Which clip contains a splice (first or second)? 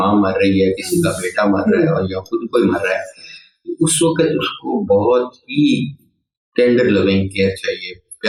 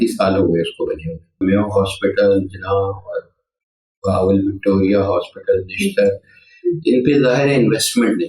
second